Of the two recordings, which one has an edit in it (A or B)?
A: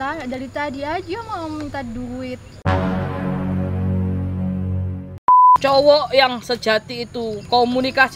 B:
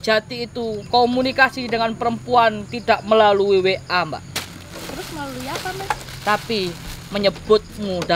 A